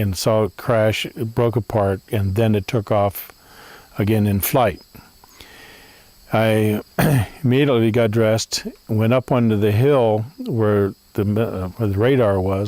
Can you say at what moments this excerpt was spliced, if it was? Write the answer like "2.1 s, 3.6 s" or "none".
11.8 s